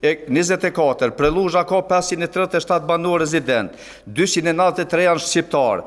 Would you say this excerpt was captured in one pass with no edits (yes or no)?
yes